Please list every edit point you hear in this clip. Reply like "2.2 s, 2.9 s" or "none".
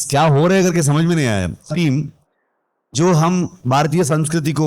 1.7 s